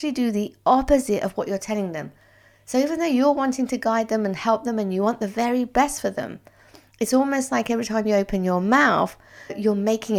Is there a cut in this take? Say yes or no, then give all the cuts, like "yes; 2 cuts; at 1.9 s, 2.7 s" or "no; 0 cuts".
no; 0 cuts